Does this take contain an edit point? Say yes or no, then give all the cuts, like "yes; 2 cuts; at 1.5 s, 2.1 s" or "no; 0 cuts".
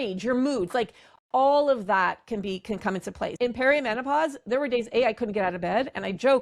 yes; 1 cut; at 3.3 s